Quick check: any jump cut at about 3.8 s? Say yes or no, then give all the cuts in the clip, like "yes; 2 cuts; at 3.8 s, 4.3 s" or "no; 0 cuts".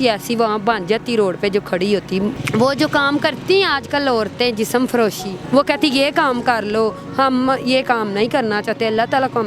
no; 2 cuts; at 2.4 s, 5.3 s